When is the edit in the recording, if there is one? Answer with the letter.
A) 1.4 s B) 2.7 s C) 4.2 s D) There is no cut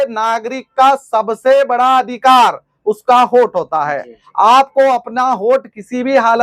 D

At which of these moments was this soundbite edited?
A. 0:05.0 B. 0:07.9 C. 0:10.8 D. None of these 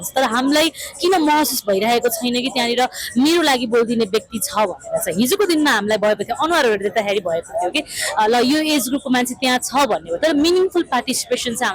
D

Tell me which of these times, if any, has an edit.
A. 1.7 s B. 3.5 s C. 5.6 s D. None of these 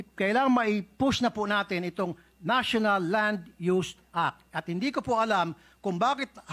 D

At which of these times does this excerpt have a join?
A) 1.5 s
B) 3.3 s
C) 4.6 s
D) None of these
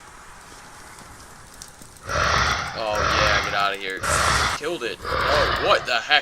C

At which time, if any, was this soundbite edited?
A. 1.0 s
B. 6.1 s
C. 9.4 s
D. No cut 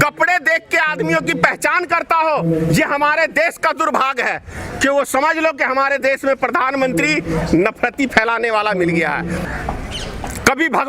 C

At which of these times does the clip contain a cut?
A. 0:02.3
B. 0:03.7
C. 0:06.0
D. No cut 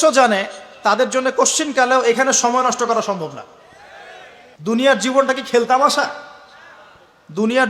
D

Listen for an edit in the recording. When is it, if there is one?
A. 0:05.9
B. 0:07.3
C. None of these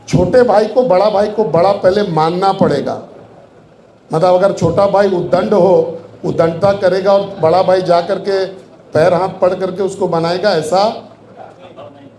C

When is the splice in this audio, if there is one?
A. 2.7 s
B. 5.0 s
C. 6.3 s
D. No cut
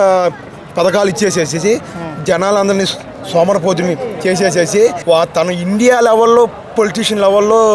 B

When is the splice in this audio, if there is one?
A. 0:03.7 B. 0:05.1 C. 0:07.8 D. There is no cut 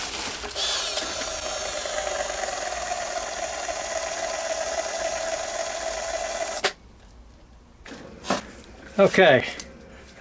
C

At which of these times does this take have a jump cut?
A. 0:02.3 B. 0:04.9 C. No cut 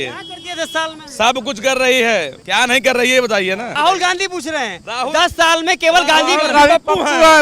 C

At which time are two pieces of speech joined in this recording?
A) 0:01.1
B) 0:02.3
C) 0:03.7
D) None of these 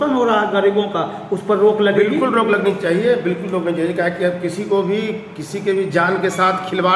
D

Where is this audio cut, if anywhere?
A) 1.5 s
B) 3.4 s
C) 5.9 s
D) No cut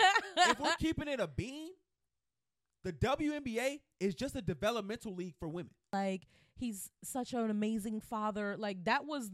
C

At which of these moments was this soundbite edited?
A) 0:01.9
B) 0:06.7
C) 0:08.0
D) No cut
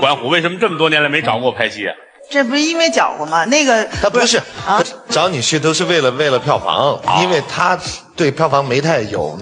A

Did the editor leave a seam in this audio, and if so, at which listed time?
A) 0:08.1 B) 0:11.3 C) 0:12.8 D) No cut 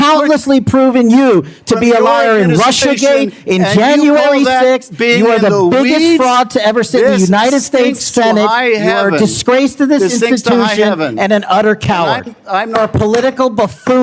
C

